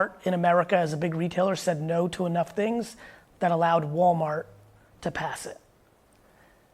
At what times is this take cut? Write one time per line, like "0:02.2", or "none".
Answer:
none